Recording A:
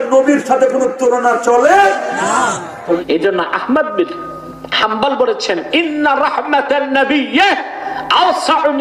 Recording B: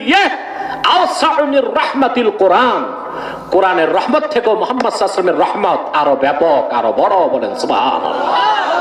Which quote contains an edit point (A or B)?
A